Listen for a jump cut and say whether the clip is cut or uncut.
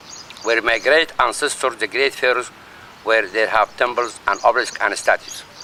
uncut